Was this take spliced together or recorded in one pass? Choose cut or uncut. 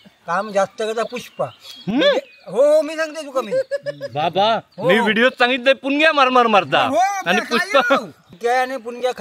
cut